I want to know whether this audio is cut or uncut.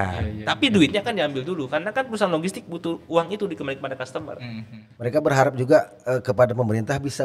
cut